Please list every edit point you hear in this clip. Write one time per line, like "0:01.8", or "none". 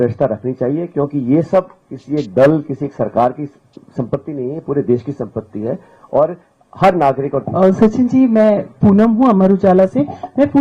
0:07.5